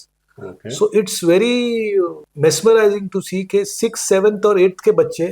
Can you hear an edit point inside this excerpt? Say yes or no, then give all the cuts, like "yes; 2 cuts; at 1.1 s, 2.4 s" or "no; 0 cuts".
yes; 1 cut; at 2.2 s